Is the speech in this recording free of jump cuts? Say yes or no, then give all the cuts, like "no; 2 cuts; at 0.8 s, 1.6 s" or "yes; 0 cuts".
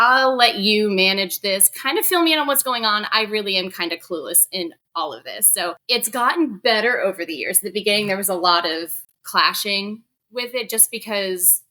no; 1 cut; at 5.8 s